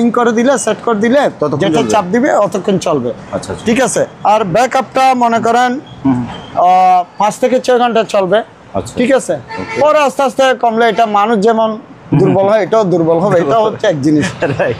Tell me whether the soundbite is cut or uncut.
uncut